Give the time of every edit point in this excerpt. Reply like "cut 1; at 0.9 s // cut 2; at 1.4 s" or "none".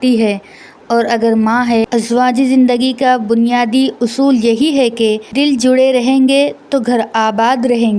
cut 1; at 1.8 s // cut 2; at 5.4 s

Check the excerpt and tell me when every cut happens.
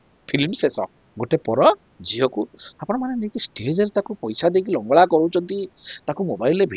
cut 1; at 1.0 s

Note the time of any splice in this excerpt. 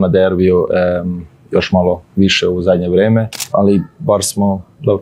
cut 1; at 3.5 s

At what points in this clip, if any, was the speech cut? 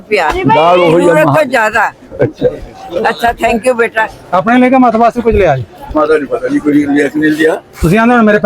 cut 1; at 4.2 s

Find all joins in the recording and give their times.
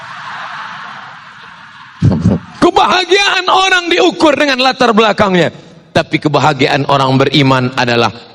cut 1; at 2.5 s

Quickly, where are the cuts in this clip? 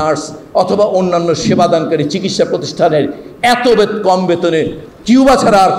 none

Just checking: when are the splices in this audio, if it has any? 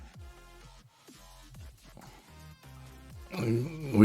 cut 1; at 2.2 s

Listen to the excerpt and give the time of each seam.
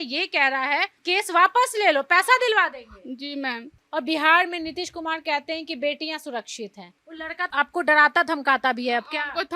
cut 1; at 3.7 s // cut 2; at 6.9 s

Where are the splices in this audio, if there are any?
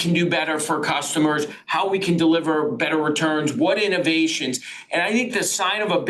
none

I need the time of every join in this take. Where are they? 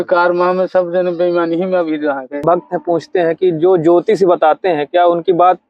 cut 1; at 2.4 s

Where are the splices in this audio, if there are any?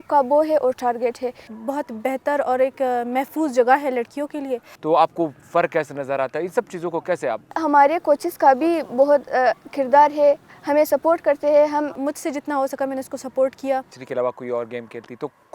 cut 1; at 1.5 s // cut 2; at 4.7 s // cut 3; at 7.6 s // cut 4; at 12.0 s // cut 5; at 14.0 s

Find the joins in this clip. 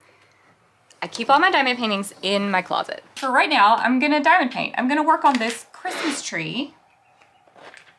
cut 1; at 3.2 s

